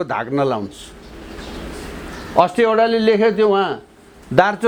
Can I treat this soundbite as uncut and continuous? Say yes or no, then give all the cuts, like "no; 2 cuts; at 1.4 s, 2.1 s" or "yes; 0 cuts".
yes; 0 cuts